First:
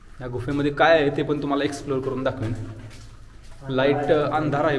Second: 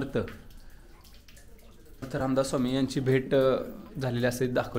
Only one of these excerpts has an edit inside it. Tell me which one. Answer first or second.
second